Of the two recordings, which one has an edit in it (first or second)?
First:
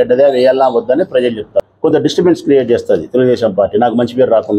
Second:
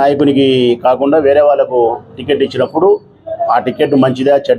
first